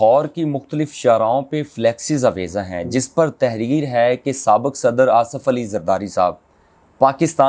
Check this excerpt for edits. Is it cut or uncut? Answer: uncut